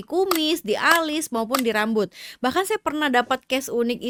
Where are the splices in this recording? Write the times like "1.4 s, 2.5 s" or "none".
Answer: none